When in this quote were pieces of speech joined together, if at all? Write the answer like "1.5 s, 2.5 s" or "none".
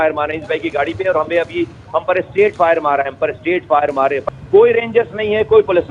4.2 s